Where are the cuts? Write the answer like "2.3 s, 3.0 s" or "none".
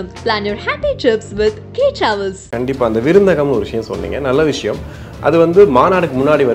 2.4 s